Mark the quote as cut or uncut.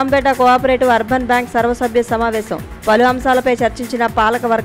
uncut